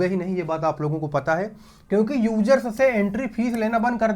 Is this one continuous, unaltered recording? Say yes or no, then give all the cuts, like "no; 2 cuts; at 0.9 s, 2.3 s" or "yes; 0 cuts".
yes; 0 cuts